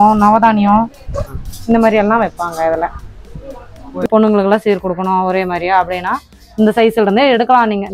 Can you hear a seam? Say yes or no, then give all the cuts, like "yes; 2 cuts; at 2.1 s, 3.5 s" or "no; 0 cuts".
yes; 1 cut; at 4.1 s